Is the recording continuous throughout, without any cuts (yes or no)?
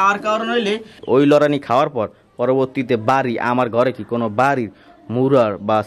no